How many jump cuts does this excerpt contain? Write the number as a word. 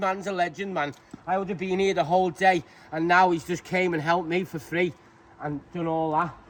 zero